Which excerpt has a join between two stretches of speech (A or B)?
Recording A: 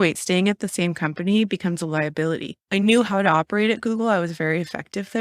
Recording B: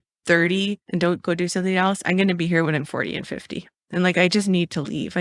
A